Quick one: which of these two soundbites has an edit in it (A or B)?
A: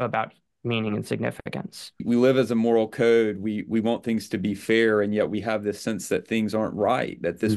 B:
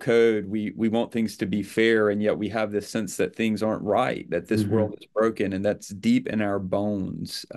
A